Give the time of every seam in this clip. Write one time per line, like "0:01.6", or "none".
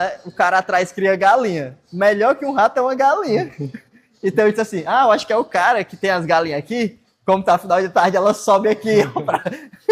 none

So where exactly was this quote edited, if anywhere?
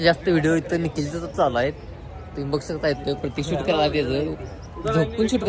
none

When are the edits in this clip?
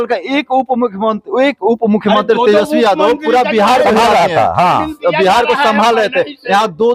none

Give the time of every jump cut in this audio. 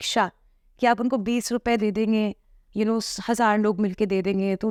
none

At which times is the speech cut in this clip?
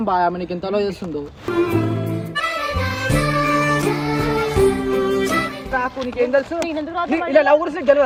none

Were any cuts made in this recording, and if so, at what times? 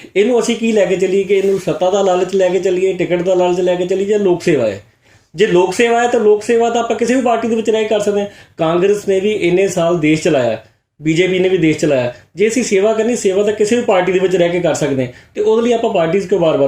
none

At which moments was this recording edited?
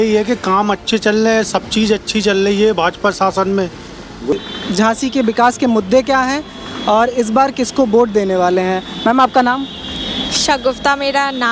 0:04.3

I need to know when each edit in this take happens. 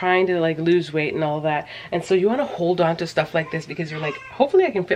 none

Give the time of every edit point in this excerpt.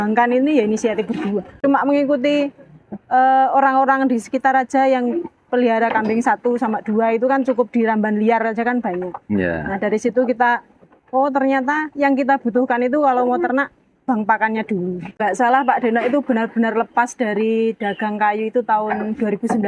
0:01.5
0:15.2

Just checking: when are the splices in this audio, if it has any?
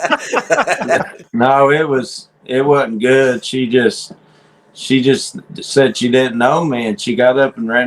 0:01.2

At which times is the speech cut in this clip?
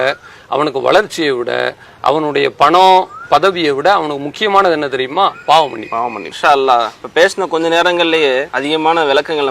0:06.2
0:07.0
0:08.5

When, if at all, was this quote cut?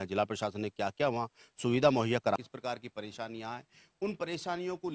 0:02.4

